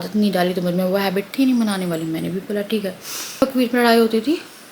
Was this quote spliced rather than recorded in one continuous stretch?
yes; 1 cut; at 3.4 s

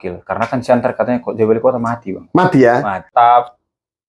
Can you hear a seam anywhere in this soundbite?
yes; 1 cut; at 3.0 s

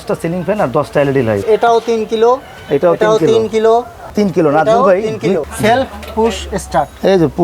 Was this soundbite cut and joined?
yes; 2 cuts; at 1.4 s, 5.4 s

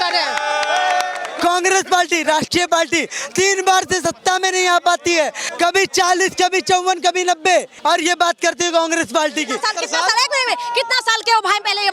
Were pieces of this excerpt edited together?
yes; 4 cuts; at 1.2 s, 5.4 s, 7.7 s, 9.6 s

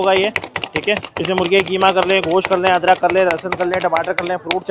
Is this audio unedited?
yes; 0 cuts

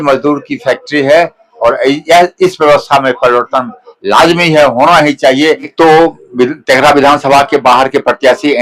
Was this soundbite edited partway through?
yes; 1 cut; at 5.7 s

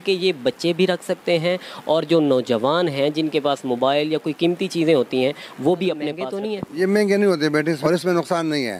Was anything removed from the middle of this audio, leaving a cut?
yes; 2 cuts; at 6.3 s, 7.8 s

